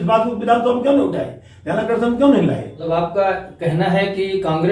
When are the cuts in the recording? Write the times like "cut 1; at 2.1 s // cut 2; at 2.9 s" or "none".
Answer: cut 1; at 2.7 s